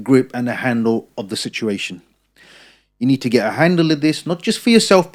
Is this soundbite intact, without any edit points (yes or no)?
yes